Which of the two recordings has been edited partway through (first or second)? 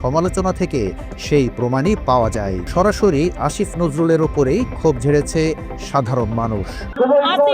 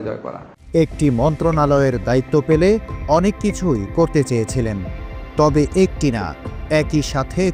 first